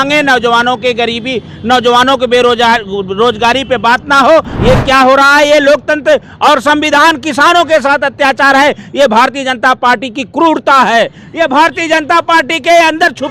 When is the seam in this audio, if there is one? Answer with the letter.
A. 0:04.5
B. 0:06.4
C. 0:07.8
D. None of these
A